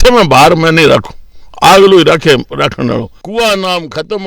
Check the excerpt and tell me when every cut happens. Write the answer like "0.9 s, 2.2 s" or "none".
3.2 s